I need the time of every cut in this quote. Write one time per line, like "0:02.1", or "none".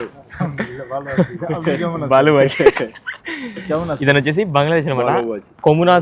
none